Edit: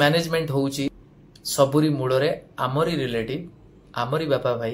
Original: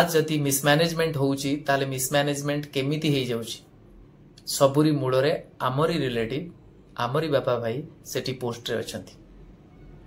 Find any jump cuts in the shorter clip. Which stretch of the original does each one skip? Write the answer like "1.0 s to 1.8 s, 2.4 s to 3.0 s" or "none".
1.6 s to 4.0 s